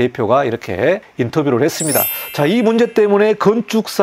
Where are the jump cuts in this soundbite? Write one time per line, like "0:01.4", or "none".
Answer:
0:01.1
0:02.2